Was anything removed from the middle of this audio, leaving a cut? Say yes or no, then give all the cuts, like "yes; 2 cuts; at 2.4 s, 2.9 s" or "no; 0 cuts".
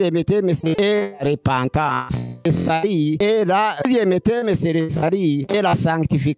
yes; 4 cuts; at 0.8 s, 2.3 s, 3.3 s, 5.4 s